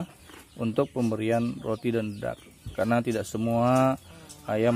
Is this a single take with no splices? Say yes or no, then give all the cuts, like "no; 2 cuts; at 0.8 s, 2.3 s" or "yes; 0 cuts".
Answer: yes; 0 cuts